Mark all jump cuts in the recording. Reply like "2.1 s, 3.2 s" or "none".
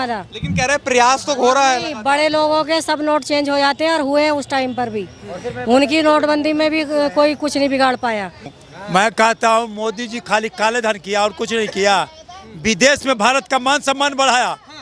8.6 s